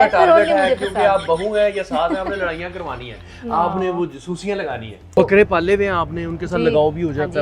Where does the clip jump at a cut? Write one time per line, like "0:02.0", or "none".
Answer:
0:05.2